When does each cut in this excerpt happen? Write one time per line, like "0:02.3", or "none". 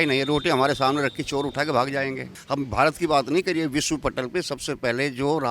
0:02.3